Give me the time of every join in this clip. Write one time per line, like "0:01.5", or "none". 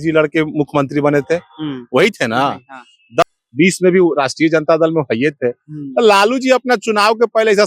0:03.2